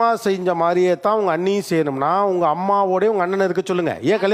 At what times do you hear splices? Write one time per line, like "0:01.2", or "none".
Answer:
none